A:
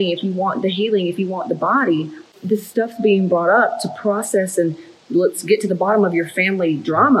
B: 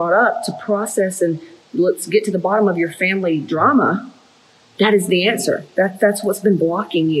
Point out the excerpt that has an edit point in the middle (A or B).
A